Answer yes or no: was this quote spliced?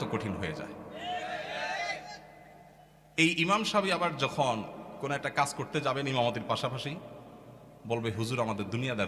no